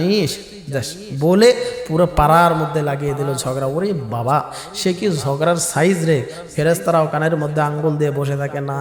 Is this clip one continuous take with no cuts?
yes; 0 cuts

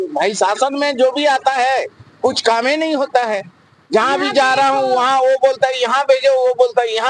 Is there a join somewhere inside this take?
no; 0 cuts

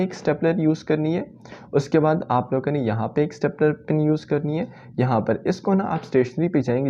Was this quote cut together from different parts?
no; 0 cuts

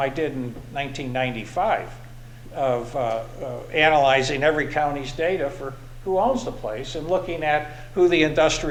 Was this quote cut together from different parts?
no; 0 cuts

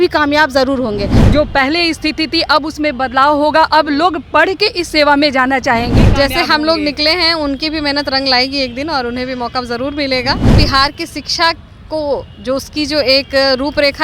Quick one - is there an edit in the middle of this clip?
yes; 3 cuts; at 1.1 s, 5.9 s, 10.5 s

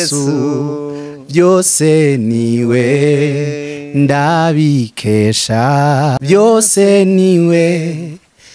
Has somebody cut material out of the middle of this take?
yes; 1 cut; at 6.2 s

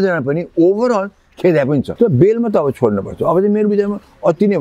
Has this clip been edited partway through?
yes; 1 cut; at 1.9 s

